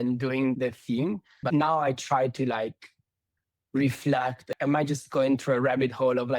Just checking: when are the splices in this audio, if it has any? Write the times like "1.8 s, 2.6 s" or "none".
1.4 s, 4.4 s